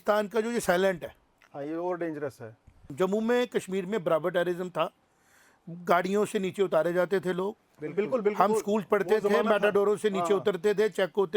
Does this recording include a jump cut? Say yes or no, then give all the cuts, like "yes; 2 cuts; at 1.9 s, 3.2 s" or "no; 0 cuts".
yes; 1 cut; at 2.8 s